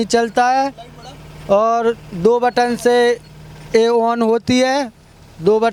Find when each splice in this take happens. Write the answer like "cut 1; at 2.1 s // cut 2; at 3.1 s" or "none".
none